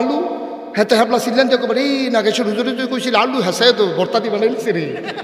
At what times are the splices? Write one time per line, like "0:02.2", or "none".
none